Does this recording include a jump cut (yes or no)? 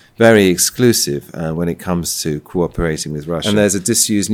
yes